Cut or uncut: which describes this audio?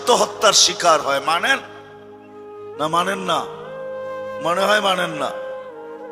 uncut